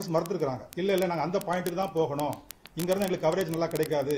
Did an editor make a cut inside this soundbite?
no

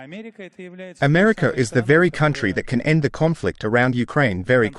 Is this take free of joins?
no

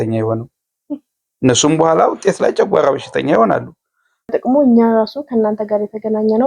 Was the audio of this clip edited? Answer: yes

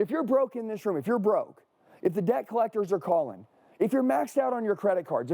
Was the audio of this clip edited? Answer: no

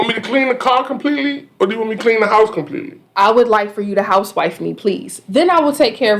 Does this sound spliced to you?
yes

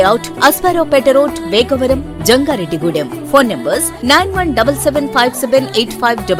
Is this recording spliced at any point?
no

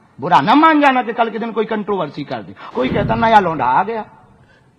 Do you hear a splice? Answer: yes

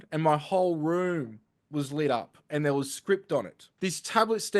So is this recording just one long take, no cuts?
no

